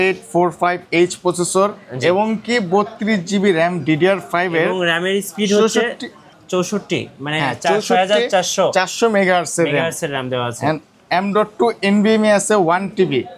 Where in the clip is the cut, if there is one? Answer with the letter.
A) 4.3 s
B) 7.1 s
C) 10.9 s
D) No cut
D